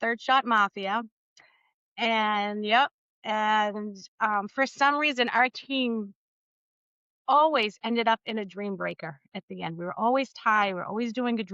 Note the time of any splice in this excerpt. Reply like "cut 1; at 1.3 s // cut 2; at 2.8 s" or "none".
none